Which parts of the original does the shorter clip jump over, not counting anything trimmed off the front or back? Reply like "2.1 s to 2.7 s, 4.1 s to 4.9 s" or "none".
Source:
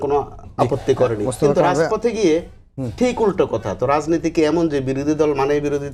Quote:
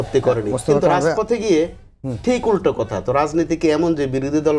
none